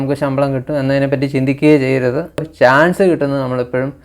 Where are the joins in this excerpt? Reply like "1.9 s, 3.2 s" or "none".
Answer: 2.5 s